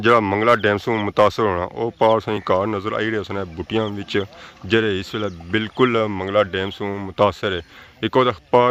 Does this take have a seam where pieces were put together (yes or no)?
no